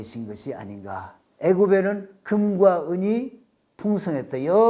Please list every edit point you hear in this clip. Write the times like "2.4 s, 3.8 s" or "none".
1.2 s